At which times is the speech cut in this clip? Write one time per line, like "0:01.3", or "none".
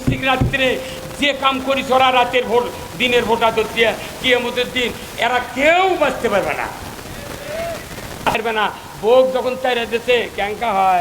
0:08.4